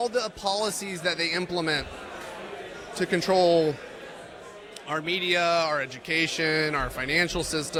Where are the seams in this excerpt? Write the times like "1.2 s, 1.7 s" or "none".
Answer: none